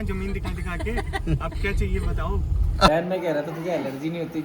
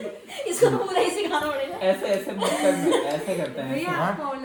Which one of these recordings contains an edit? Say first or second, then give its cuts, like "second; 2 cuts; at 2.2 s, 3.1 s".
first; 1 cut; at 2.9 s